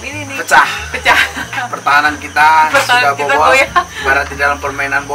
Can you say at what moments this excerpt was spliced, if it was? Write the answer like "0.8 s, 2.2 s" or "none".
1.7 s, 3.9 s